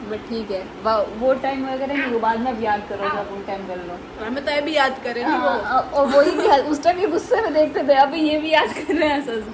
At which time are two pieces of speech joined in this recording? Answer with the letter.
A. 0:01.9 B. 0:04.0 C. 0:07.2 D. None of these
D